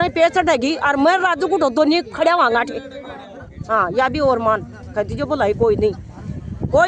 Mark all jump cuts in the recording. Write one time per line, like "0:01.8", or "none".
none